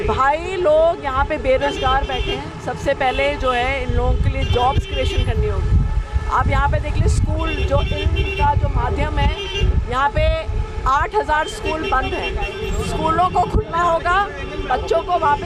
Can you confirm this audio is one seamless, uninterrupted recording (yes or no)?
yes